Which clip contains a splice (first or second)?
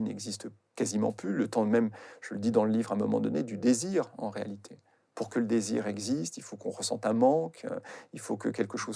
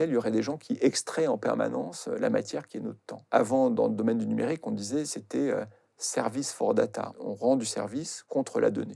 second